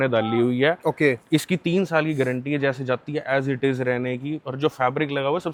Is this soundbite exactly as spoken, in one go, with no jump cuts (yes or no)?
yes